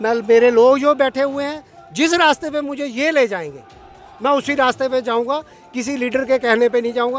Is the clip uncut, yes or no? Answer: yes